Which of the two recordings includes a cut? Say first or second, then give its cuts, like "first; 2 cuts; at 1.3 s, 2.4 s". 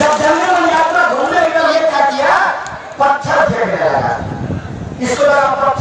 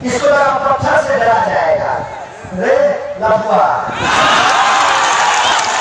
first; 1 cut; at 1.4 s